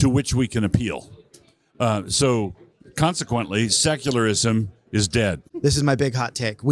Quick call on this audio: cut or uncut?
cut